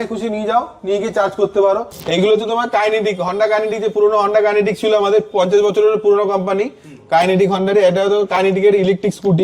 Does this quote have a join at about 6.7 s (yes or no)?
no